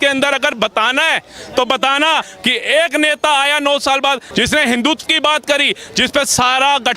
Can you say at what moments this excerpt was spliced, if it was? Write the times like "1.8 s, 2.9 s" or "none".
2.2 s, 4.2 s